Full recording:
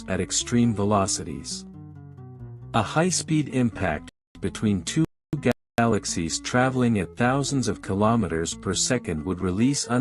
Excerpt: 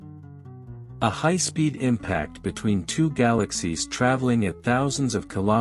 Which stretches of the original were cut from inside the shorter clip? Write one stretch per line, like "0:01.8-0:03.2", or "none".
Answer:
0:04.1-0:04.3
0:05.1-0:05.7